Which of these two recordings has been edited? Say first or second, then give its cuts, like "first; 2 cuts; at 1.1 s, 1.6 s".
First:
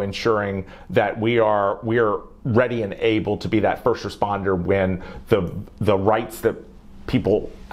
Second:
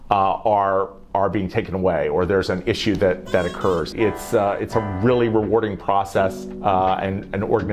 second; 2 cuts; at 3.9 s, 6.5 s